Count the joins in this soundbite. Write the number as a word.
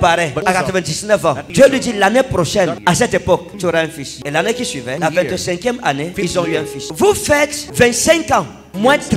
one